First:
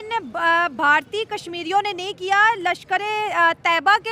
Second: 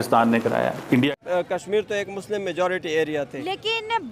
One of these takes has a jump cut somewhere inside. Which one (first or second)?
second